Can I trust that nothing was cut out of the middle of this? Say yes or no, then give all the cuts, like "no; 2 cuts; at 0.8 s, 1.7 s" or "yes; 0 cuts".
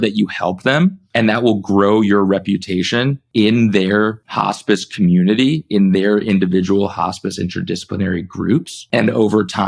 no; 4 cuts; at 1.0 s, 3.2 s, 4.3 s, 8.8 s